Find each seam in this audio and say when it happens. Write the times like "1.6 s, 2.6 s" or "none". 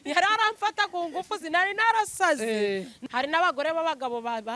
2.9 s